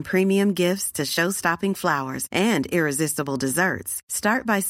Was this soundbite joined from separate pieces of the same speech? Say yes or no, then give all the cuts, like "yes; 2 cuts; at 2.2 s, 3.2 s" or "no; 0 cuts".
no; 0 cuts